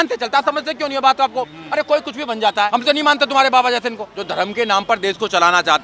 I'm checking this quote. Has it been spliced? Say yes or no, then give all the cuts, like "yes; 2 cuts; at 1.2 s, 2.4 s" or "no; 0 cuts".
yes; 2 cuts; at 2.7 s, 4.0 s